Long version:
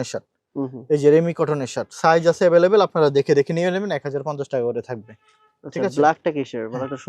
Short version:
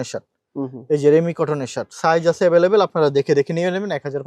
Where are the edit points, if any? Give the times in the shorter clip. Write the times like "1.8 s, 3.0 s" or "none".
none